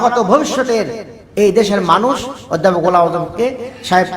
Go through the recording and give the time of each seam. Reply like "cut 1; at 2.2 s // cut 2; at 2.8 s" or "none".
none